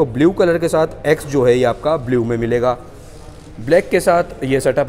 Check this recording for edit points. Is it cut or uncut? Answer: uncut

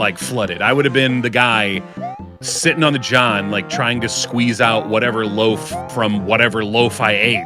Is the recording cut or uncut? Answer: uncut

